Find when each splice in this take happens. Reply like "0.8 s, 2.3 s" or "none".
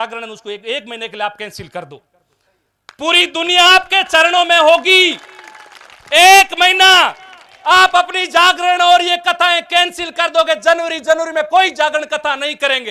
none